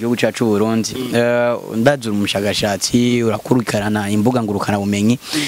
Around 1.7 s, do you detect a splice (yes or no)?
no